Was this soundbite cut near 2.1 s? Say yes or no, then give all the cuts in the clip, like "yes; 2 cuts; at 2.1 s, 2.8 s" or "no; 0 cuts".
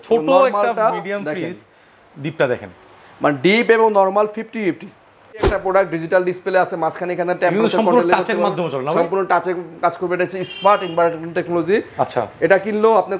no; 1 cut; at 5.5 s